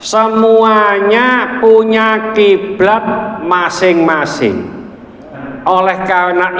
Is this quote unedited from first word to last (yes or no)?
no